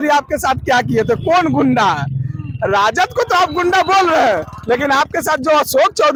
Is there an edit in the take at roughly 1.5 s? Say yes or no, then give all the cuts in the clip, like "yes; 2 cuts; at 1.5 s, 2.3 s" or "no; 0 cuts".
no; 0 cuts